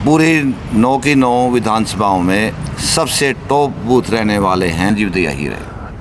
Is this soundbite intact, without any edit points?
no; 1 cut; at 4.9 s

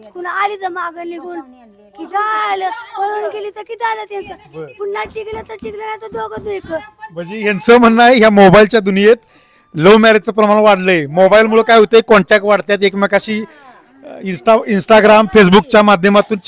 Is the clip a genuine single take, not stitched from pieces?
yes; 0 cuts

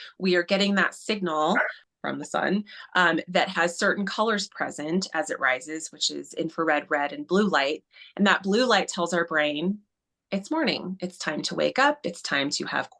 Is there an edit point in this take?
yes; 1 cut; at 1.8 s

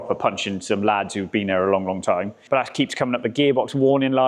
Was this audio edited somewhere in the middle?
yes; 1 cut; at 2.4 s

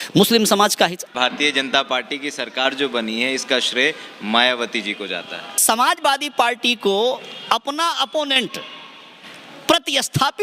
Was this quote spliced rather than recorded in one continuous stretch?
yes; 2 cuts; at 1.1 s, 5.5 s

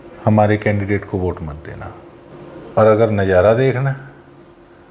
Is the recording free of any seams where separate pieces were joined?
no; 1 cut; at 2.3 s

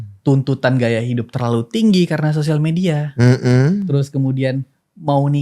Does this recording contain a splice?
no; 0 cuts

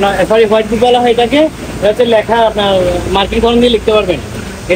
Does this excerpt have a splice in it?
no; 0 cuts

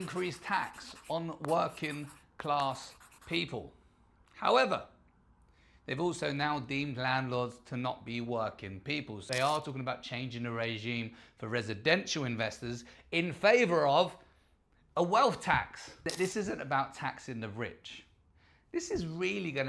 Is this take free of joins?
no; 2 cuts; at 9.2 s, 16.0 s

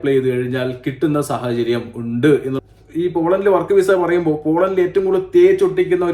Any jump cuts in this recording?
yes; 1 cut; at 2.6 s

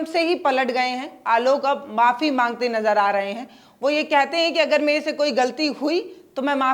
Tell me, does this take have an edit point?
no; 0 cuts

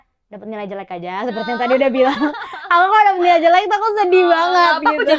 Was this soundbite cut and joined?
no; 0 cuts

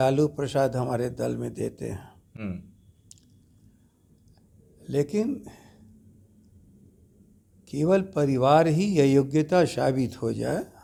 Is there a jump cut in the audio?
no; 0 cuts

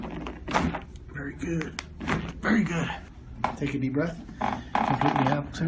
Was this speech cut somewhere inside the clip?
no; 0 cuts

